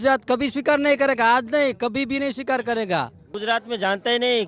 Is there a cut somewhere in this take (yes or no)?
yes